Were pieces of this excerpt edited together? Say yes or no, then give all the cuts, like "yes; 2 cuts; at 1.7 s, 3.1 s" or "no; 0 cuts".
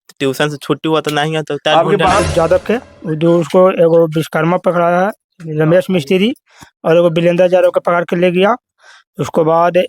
yes; 1 cut; at 2.2 s